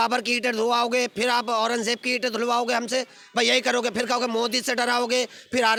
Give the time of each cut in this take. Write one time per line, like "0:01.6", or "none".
none